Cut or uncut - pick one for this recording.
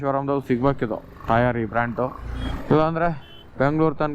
cut